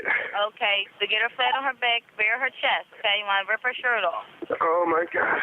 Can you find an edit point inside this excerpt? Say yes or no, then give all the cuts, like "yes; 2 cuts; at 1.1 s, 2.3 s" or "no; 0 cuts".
yes; 2 cuts; at 0.9 s, 4.3 s